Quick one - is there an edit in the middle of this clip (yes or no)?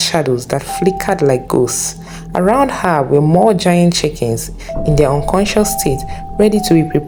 no